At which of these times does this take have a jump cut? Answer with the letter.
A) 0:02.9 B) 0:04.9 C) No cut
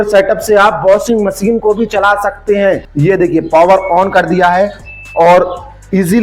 A